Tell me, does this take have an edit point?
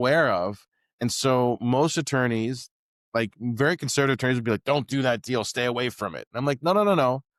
no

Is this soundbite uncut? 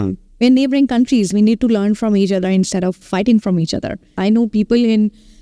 no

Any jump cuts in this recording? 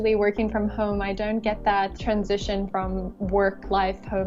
yes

